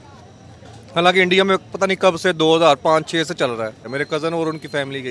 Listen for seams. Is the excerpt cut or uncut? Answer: cut